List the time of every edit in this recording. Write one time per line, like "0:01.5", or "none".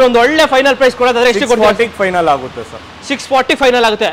none

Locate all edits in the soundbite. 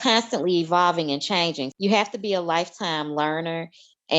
0:01.7

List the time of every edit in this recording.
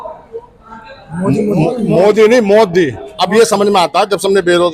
none

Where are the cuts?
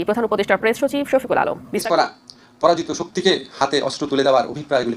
0:01.8

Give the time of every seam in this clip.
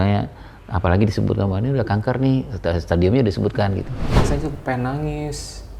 0:04.0

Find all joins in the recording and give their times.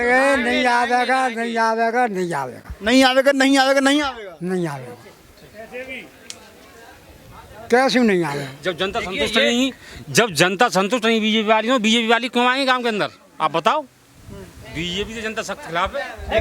none

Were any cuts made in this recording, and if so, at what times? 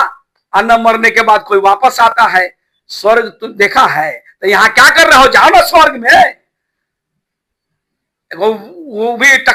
none

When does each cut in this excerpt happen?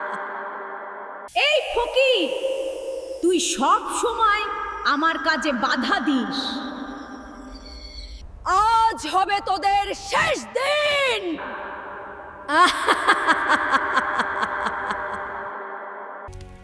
0:01.1

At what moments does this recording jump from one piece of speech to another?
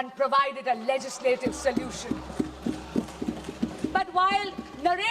none

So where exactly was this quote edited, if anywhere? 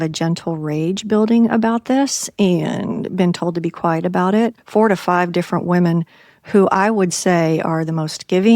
0:04.6

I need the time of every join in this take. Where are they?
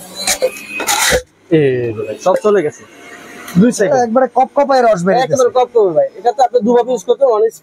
none

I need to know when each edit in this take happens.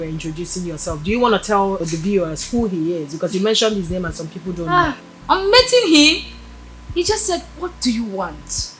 0:05.1

